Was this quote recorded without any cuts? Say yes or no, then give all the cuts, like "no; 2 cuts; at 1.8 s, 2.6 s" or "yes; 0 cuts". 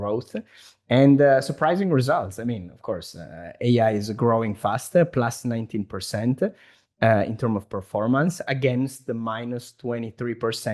yes; 0 cuts